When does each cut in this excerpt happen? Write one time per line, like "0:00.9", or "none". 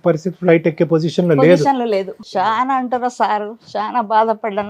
0:02.2